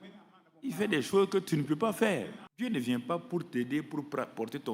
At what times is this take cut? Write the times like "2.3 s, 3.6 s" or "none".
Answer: 2.4 s